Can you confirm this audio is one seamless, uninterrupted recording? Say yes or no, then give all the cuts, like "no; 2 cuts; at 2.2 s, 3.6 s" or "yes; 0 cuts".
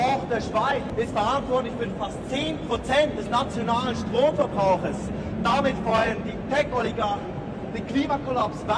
yes; 0 cuts